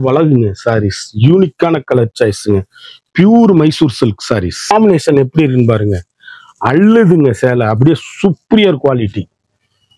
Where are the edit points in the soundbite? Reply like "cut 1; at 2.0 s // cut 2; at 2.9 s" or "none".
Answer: cut 1; at 4.7 s